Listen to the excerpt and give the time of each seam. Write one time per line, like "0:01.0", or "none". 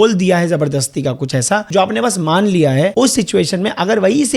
0:01.7
0:02.9